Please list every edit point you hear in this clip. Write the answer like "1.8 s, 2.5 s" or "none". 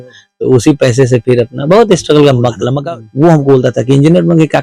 2.7 s